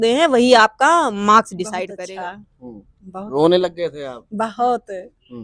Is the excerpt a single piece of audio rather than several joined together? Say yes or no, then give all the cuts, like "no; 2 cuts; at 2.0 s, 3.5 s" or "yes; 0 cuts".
no; 1 cut; at 1.9 s